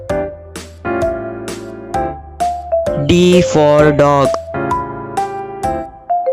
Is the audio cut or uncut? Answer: uncut